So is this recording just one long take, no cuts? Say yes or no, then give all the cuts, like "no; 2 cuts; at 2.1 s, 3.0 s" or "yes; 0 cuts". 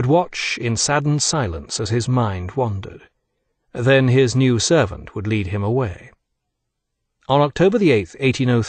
no; 1 cut; at 2.2 s